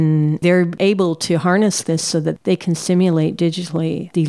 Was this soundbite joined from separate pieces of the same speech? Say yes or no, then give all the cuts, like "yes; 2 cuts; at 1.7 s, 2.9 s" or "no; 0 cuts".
no; 0 cuts